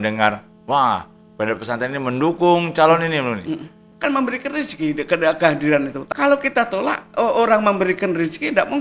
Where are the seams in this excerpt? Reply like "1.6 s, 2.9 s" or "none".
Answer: 3.8 s, 6.0 s